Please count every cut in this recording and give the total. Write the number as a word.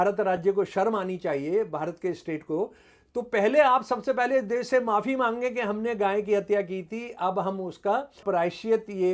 one